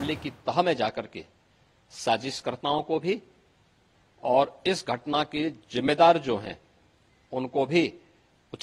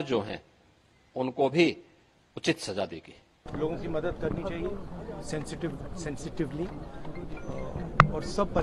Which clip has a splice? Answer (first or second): second